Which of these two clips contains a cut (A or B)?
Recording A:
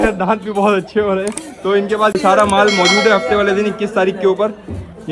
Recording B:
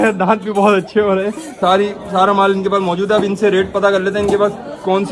B